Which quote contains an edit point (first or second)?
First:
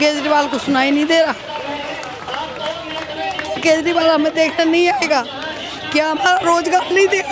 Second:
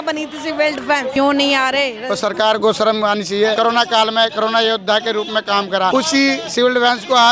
second